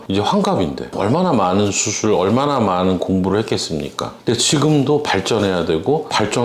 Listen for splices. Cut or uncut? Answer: cut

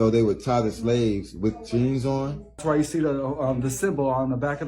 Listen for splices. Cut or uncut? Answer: cut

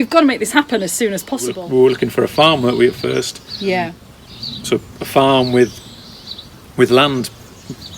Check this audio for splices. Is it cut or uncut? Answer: cut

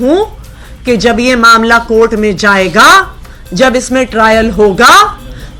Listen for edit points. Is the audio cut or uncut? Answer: uncut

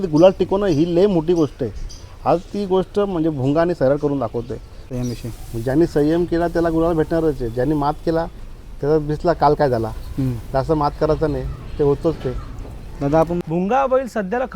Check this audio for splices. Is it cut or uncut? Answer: cut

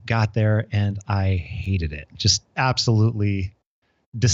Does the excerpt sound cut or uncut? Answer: uncut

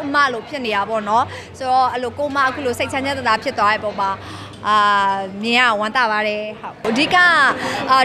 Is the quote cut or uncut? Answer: uncut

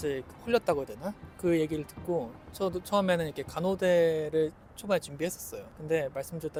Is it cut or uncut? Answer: uncut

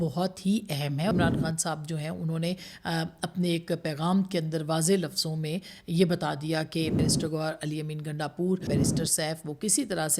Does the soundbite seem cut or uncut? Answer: cut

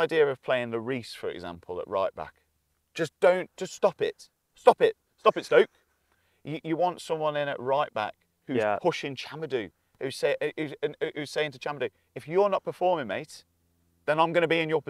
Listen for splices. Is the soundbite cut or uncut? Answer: cut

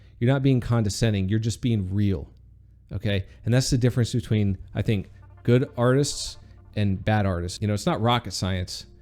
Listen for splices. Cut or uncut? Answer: cut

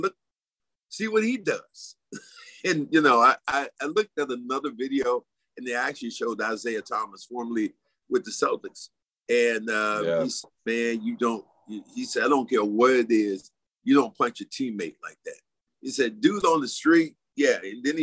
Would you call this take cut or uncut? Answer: uncut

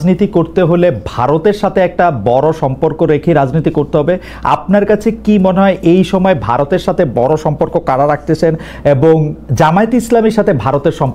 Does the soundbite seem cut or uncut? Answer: uncut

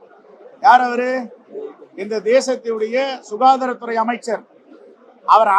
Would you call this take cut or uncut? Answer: uncut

